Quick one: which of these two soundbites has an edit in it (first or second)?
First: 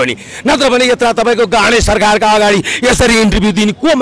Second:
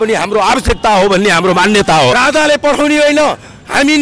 second